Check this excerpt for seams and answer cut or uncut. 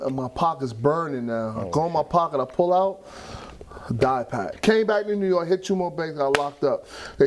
cut